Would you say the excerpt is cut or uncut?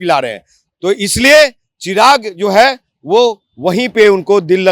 uncut